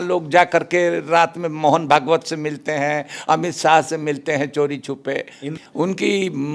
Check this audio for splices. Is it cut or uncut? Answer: cut